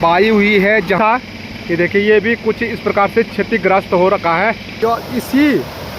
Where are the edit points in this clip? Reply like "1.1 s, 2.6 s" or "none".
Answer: 1.0 s, 4.8 s